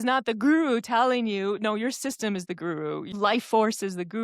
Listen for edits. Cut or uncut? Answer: cut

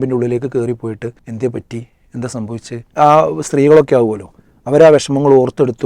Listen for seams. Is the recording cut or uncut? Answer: cut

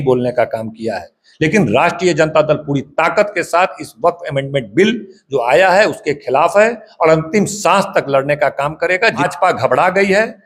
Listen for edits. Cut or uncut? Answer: cut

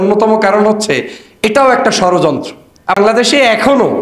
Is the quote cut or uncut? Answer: cut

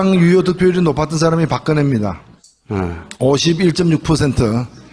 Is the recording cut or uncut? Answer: uncut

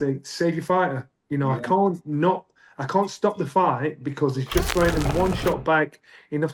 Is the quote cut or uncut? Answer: uncut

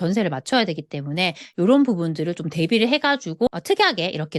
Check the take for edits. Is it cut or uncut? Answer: cut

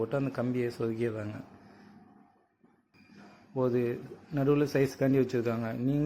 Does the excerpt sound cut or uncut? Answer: cut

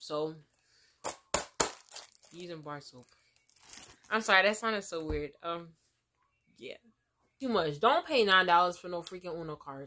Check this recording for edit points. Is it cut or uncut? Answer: cut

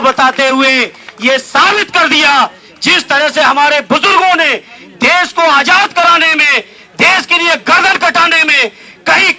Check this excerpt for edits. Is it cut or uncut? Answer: uncut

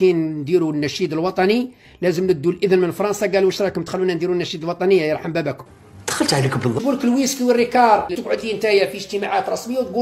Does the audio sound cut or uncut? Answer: cut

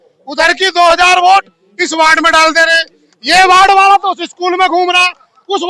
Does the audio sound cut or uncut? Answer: uncut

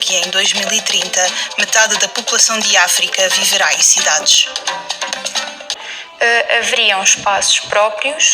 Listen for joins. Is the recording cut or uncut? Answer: cut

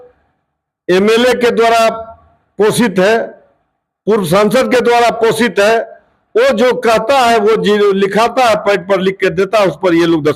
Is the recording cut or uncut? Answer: uncut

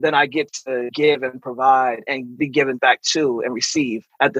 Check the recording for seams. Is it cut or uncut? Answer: cut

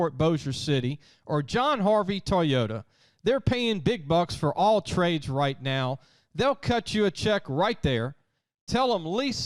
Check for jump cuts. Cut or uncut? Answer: uncut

